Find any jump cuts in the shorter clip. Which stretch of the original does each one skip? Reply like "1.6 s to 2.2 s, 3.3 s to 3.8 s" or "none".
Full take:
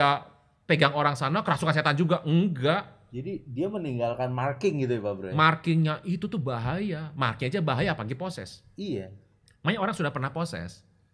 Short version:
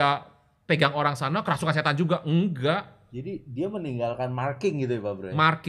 none